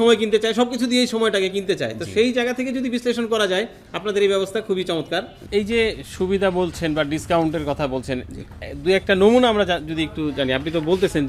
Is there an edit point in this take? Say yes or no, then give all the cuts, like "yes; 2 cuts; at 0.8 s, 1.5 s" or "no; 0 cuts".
yes; 1 cut; at 5.3 s